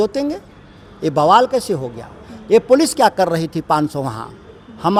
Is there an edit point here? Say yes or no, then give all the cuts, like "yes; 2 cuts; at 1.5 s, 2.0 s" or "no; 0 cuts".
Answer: no; 0 cuts